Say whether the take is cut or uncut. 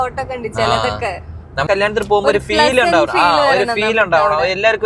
cut